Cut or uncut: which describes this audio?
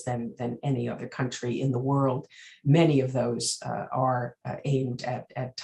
uncut